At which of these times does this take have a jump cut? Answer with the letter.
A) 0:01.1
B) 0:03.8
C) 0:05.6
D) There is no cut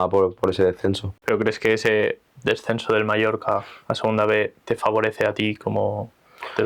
A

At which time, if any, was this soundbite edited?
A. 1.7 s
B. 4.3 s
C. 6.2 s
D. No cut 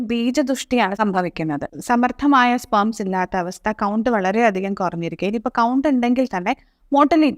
A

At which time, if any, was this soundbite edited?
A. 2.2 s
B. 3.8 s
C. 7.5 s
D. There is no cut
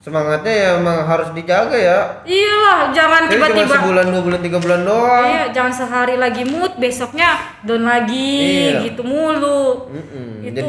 D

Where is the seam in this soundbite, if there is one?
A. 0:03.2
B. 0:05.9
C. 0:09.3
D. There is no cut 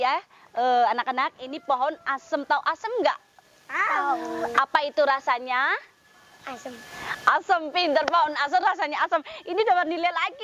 D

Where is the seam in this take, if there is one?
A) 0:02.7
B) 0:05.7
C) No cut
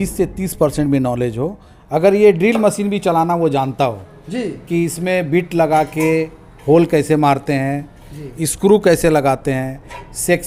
C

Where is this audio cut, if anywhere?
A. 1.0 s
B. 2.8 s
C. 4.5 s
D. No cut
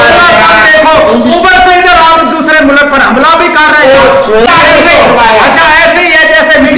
C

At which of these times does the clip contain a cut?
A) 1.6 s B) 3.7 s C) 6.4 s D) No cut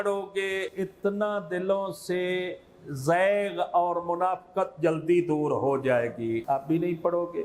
C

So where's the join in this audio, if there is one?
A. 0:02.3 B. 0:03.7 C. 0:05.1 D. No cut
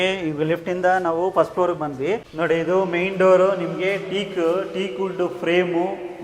A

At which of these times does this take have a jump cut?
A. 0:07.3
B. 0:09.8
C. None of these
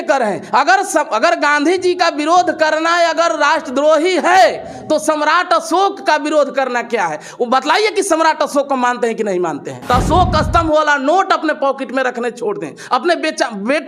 B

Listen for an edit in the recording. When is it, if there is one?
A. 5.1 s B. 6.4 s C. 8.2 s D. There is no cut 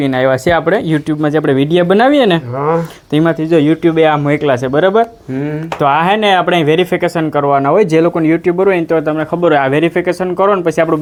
D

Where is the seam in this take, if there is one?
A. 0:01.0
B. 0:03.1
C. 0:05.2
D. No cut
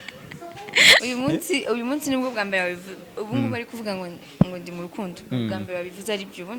A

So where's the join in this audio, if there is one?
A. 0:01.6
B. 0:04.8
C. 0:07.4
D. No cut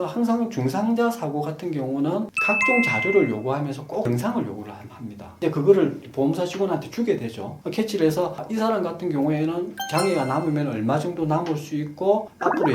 C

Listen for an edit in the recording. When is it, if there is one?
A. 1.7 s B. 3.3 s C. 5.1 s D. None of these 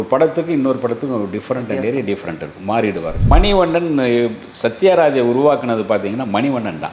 B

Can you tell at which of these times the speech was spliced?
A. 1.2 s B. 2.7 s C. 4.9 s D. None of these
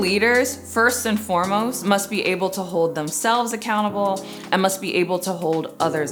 D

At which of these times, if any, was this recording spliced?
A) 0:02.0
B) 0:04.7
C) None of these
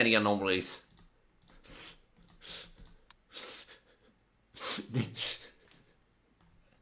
C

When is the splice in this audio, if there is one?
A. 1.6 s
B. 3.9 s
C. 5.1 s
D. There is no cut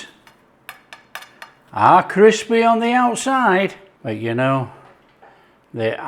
B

